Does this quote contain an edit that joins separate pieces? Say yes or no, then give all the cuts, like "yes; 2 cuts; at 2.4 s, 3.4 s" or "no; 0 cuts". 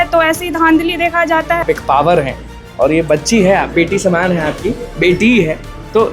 yes; 1 cut; at 1.6 s